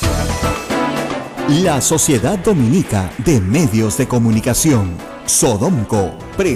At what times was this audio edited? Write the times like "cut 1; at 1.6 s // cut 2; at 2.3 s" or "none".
cut 1; at 1.3 s